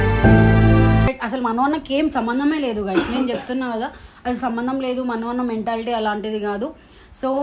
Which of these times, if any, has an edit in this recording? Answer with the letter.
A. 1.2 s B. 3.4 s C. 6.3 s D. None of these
A